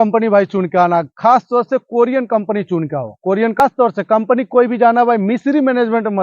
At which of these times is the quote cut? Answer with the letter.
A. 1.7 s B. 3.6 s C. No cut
B